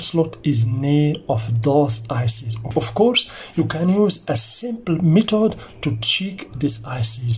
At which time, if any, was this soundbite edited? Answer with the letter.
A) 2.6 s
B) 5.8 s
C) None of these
A